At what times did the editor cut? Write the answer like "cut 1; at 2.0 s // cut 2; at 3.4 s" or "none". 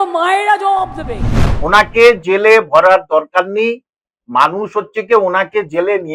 cut 1; at 1.5 s